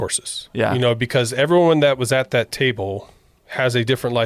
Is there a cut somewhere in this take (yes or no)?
no